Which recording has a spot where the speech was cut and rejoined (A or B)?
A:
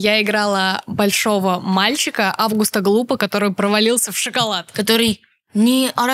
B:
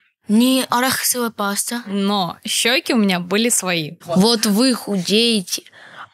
B